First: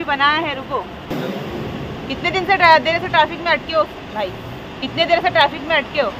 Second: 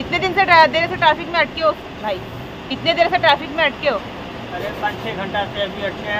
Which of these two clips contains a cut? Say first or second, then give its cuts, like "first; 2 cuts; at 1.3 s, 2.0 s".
first; 1 cut; at 1.1 s